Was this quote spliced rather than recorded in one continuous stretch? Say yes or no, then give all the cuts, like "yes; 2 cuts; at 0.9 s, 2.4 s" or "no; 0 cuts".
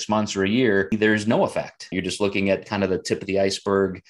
yes; 2 cuts; at 0.9 s, 1.9 s